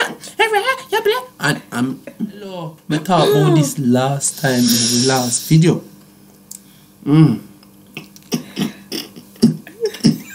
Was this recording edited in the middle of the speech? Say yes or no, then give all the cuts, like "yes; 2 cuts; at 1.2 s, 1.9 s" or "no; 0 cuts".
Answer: yes; 1 cut; at 2.8 s